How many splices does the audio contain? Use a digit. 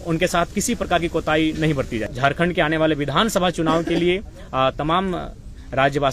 1